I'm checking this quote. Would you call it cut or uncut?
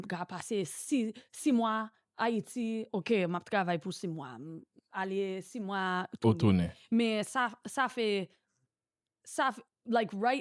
uncut